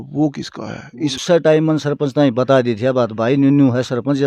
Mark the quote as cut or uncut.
cut